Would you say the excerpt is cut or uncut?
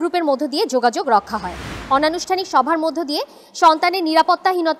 cut